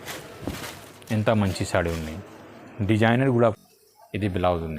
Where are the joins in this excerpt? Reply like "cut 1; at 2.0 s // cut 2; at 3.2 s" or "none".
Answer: cut 1; at 3.6 s